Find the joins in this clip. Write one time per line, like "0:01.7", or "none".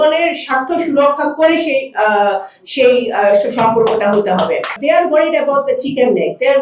0:04.8